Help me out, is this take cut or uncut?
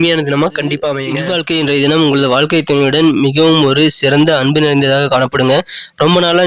cut